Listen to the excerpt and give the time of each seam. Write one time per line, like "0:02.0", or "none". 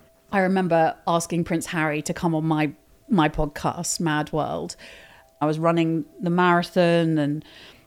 0:02.9
0:05.4